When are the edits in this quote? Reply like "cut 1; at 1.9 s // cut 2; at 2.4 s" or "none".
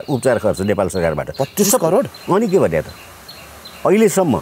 none